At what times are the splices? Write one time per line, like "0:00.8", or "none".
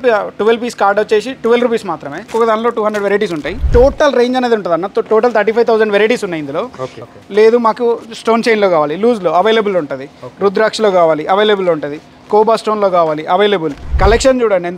0:02.2
0:03.6
0:06.8
0:13.8